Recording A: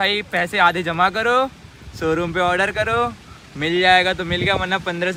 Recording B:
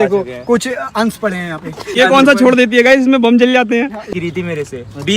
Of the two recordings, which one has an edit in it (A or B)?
B